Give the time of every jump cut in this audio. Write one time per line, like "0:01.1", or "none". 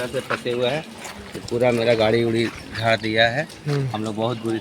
none